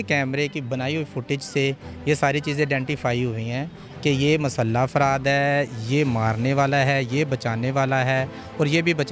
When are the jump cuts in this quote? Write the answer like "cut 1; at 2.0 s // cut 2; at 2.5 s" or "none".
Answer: none